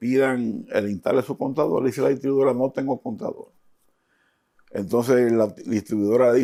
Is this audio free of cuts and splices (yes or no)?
yes